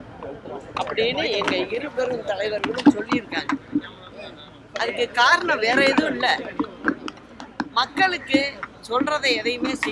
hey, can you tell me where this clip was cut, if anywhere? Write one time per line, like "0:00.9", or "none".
none